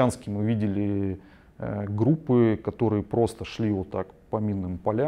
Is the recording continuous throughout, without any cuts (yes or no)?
yes